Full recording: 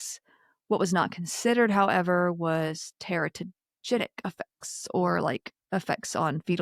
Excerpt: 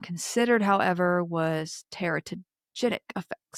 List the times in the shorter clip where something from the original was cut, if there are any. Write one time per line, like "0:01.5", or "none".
none